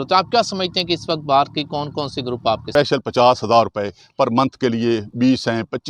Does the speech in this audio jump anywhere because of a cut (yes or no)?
yes